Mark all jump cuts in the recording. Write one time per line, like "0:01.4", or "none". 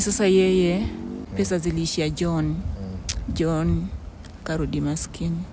0:01.3